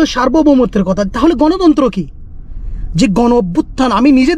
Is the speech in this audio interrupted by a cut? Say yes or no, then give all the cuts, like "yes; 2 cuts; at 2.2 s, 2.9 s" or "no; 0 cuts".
no; 0 cuts